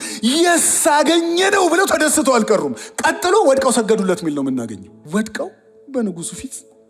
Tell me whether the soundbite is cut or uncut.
cut